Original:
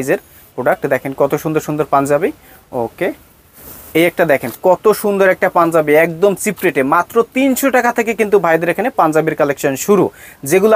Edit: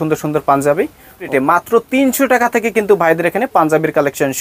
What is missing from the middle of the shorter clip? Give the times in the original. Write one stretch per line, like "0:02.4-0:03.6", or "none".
0:02.7-0:06.7